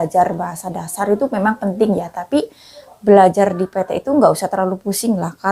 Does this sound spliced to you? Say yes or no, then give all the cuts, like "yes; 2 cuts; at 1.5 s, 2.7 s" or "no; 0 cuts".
no; 0 cuts